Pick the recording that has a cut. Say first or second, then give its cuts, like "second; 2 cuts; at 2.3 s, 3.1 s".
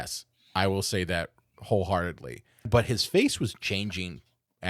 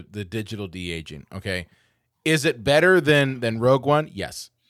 first; 1 cut; at 2.7 s